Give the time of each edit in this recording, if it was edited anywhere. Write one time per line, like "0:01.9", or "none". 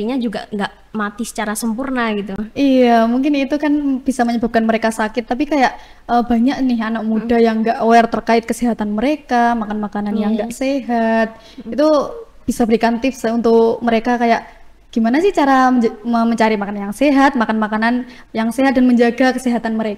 none